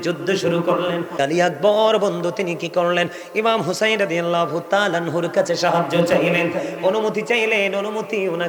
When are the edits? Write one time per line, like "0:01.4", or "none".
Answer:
0:01.2

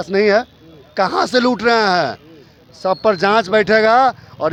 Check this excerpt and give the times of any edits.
none

